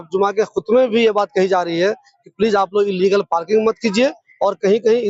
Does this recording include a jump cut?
no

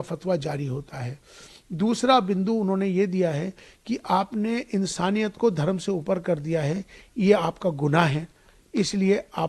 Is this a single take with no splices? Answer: yes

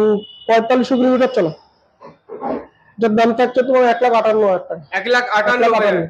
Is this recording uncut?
no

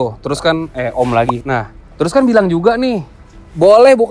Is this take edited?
yes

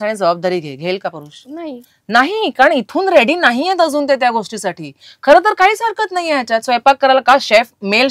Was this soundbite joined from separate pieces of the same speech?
no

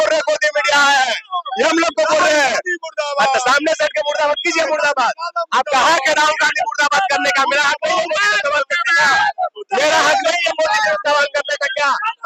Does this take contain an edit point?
no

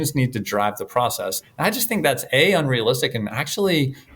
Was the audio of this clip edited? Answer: yes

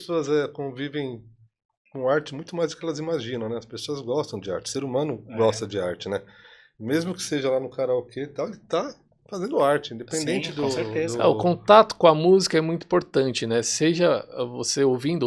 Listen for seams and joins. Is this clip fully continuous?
yes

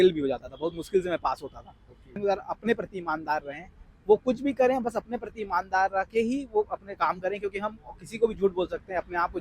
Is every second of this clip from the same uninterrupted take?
no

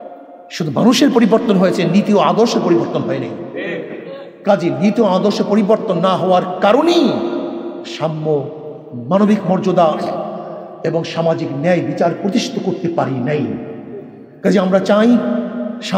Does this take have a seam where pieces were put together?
no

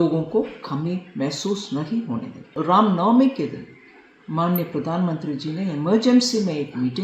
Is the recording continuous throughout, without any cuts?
no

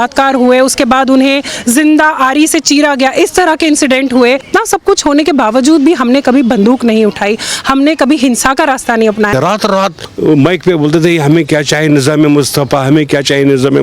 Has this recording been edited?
yes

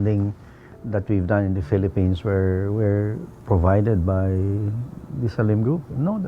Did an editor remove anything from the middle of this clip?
no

